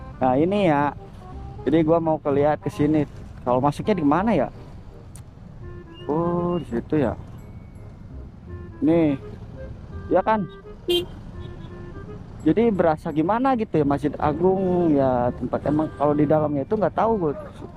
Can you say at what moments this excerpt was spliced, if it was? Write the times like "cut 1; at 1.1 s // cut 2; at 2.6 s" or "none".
none